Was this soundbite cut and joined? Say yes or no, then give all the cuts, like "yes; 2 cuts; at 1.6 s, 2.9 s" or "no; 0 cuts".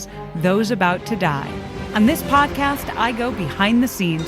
yes; 1 cut; at 1.8 s